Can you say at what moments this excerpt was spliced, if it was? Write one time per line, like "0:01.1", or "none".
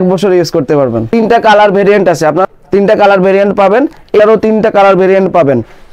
0:01.0
0:02.5
0:04.2